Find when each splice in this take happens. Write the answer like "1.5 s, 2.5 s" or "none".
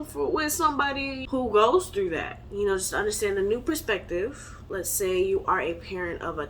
1.2 s, 4.8 s